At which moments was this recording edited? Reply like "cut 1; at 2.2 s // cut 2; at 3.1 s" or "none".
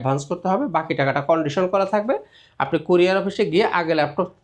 none